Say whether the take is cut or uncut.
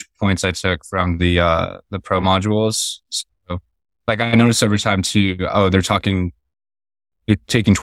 uncut